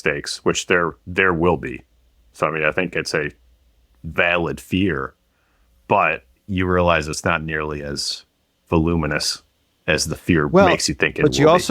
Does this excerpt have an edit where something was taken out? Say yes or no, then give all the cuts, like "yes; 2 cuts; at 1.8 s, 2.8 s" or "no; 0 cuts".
no; 0 cuts